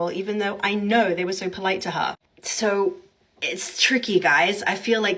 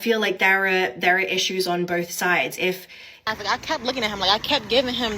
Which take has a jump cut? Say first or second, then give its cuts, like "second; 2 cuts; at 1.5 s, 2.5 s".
second; 1 cut; at 3.2 s